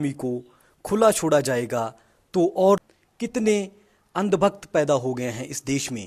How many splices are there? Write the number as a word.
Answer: one